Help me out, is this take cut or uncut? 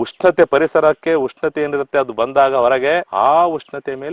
cut